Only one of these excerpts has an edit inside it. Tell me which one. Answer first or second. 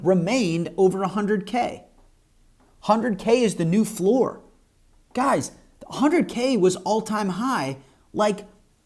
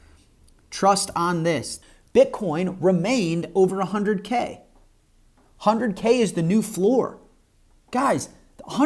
second